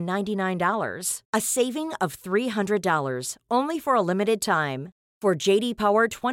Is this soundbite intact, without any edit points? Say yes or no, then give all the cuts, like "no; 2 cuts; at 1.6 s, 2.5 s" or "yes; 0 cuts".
yes; 0 cuts